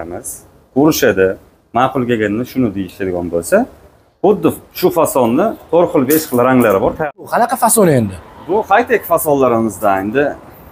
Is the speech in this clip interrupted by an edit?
yes; 1 cut; at 7.2 s

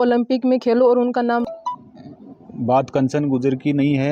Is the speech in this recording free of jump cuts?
no; 1 cut; at 1.4 s

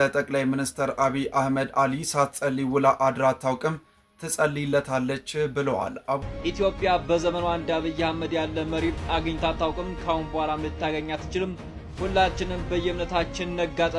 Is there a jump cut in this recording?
yes; 1 cut; at 6.3 s

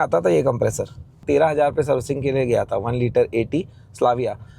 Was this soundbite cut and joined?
yes; 1 cut; at 1.2 s

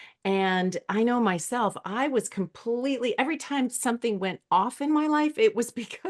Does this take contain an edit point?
no; 0 cuts

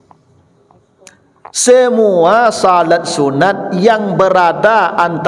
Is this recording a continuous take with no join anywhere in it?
yes; 0 cuts

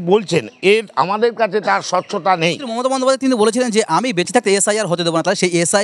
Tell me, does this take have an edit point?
yes; 1 cut; at 2.7 s

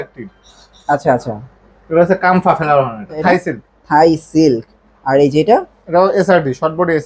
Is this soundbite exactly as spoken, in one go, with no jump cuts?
no; 1 cut; at 3.2 s

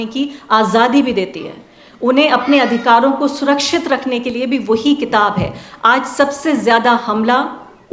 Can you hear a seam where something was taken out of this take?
no; 0 cuts

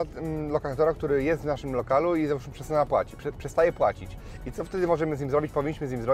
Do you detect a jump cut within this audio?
no; 0 cuts

